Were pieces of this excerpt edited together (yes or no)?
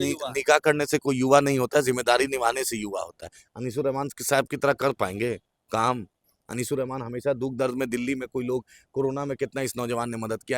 no